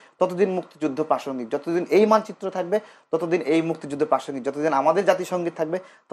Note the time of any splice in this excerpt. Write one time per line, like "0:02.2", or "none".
none